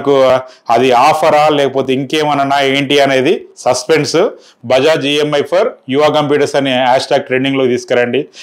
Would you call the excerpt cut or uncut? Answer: cut